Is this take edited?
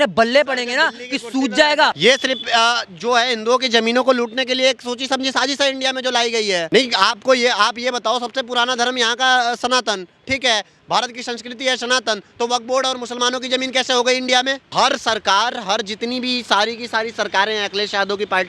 yes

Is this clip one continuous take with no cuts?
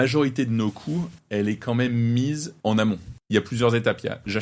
no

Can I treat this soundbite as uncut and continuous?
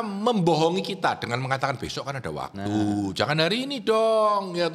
yes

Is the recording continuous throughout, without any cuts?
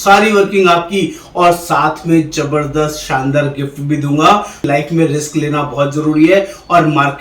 no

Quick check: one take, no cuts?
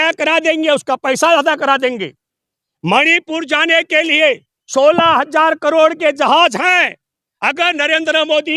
yes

